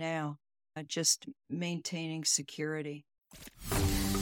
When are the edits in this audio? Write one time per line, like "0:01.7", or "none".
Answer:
0:03.3